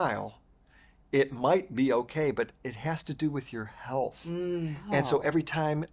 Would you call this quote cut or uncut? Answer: uncut